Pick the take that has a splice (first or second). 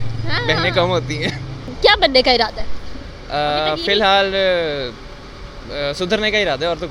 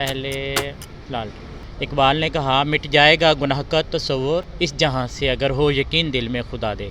second